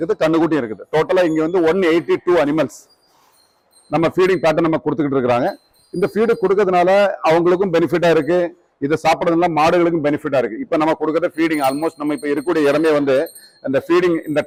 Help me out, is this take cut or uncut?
uncut